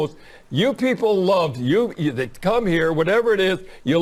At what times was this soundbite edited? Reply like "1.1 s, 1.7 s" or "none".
none